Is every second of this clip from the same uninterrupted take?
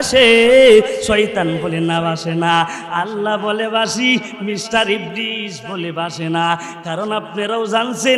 yes; 0 cuts

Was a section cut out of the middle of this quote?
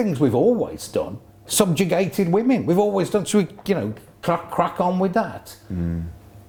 no; 0 cuts

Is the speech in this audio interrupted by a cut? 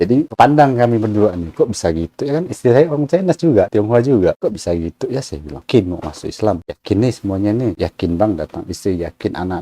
yes; 2 cuts; at 5.6 s, 6.6 s

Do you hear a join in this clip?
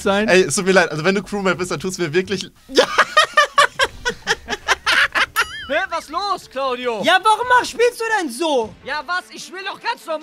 yes; 1 cut; at 5.6 s

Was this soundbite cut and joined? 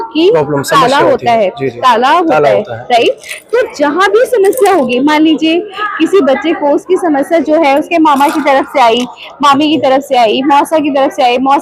no; 0 cuts

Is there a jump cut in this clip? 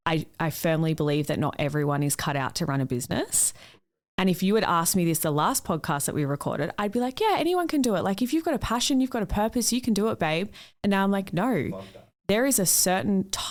no; 0 cuts

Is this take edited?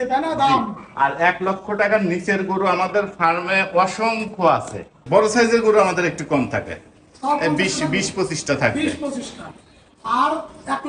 yes; 1 cut; at 5.0 s

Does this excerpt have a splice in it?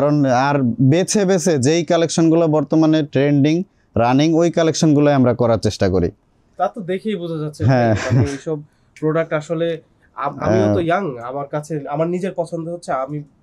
no; 0 cuts

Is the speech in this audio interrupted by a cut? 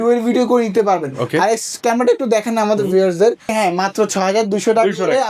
yes; 1 cut; at 3.5 s

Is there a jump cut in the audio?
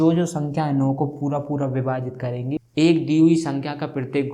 yes; 1 cut; at 2.6 s

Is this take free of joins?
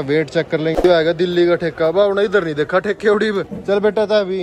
no; 2 cuts; at 0.8 s, 3.5 s

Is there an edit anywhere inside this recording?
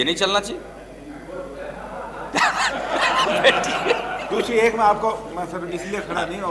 no; 0 cuts

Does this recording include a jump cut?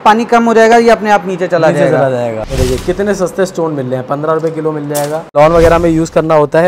yes; 2 cuts; at 2.5 s, 5.3 s

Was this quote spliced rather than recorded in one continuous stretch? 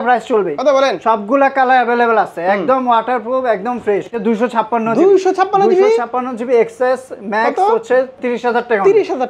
yes; 2 cuts; at 4.2 s, 8.1 s

